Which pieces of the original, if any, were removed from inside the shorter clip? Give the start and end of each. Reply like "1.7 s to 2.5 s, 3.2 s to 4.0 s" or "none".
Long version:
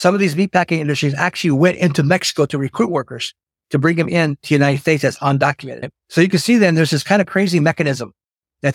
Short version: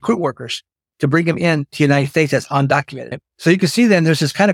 none